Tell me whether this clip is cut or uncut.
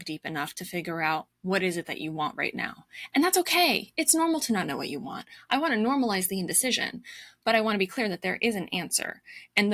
uncut